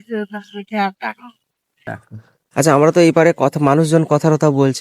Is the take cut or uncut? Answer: cut